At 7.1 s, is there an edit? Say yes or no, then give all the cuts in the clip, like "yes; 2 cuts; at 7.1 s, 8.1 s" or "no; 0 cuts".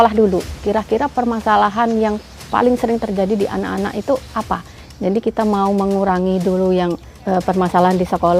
yes; 1 cut; at 7.1 s